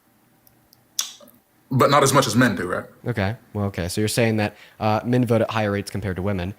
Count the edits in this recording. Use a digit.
1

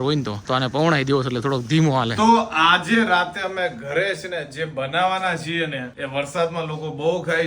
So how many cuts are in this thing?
1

